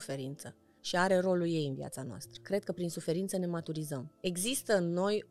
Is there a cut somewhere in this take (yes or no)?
yes